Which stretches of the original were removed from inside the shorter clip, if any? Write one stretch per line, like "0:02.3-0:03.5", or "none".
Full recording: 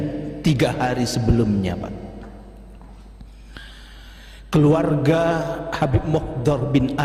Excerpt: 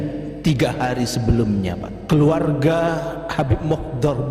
0:01.9-0:04.4